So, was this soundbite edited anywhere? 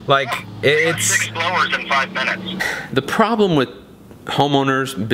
yes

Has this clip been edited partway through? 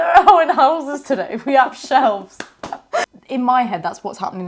yes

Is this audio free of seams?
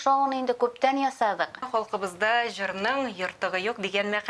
no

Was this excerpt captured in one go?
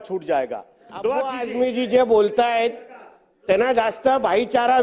no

